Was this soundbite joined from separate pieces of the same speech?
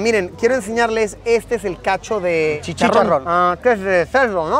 yes; 1 cut; at 2.6 s

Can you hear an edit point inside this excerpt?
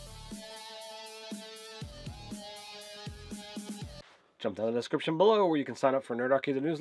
yes; 1 cut; at 3.9 s

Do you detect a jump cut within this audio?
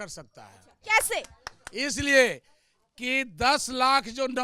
no; 0 cuts

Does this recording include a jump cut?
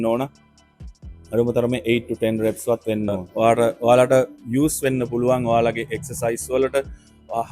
yes; 1 cut; at 3.2 s

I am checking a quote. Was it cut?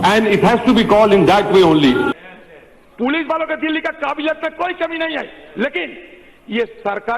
yes; 1 cut; at 2.1 s

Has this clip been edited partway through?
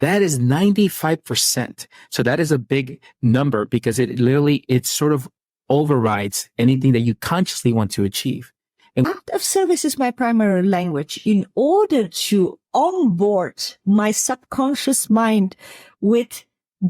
yes; 1 cut; at 9.1 s

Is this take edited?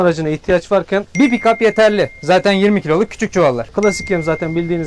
yes; 2 cuts; at 1.1 s, 3.7 s

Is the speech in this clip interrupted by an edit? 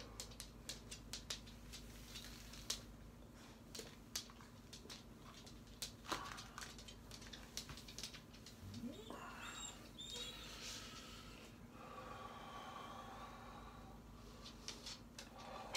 no; 0 cuts

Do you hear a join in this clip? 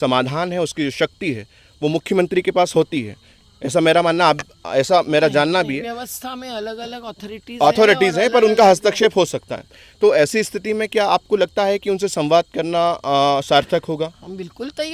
no; 0 cuts

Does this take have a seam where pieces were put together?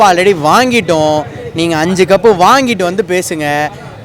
no; 0 cuts

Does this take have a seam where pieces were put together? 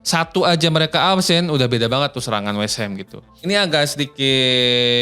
yes; 1 cut; at 3.3 s

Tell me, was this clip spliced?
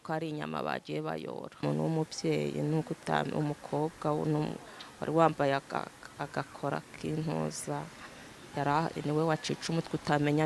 yes; 1 cut; at 1.6 s

